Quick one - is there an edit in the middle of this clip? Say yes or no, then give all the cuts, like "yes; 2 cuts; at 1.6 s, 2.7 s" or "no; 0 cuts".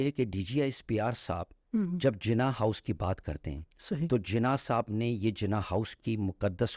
no; 0 cuts